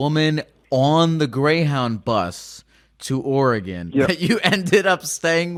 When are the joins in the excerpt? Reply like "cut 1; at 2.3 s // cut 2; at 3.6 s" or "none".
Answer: none